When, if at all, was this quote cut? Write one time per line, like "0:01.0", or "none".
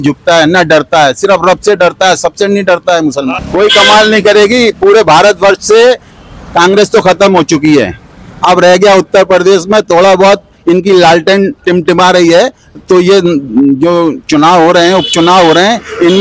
0:03.4